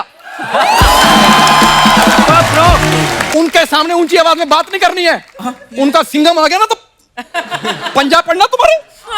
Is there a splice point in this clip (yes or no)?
yes